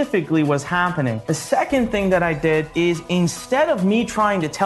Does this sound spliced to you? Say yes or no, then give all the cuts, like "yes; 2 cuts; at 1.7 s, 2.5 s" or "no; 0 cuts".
yes; 2 cuts; at 1.3 s, 2.7 s